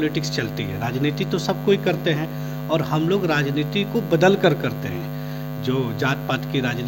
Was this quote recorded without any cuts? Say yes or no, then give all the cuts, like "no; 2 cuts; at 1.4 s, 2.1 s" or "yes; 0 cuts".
yes; 0 cuts